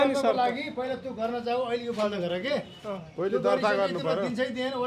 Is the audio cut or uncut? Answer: uncut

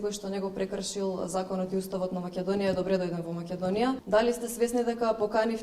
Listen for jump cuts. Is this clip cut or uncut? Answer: cut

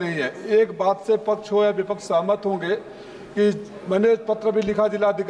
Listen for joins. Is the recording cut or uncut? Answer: uncut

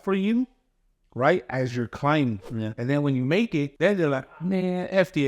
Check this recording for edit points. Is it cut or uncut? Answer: cut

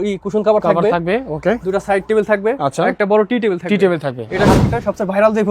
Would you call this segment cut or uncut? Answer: cut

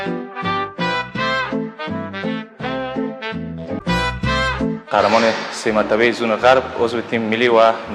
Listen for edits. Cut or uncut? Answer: cut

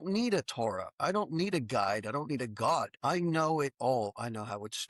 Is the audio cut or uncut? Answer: cut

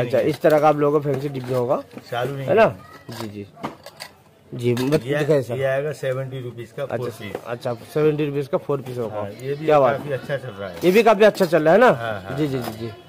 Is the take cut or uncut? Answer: uncut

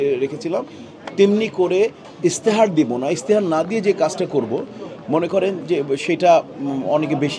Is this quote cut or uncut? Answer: uncut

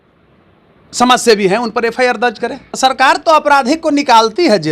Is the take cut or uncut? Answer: cut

